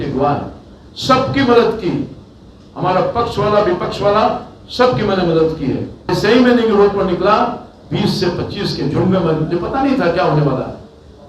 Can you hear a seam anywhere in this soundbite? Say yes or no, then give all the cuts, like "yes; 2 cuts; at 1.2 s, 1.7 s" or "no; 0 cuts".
yes; 1 cut; at 6.1 s